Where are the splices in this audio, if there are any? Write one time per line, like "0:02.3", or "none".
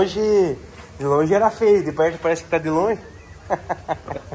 none